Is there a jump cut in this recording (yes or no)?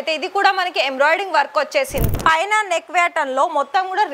yes